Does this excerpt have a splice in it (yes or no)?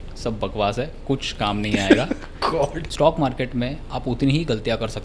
yes